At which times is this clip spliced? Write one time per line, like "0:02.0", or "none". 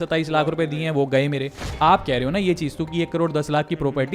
0:01.7